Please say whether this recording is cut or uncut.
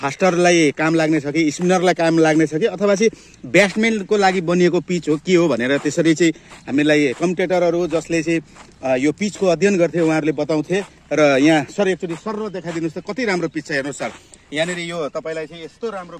uncut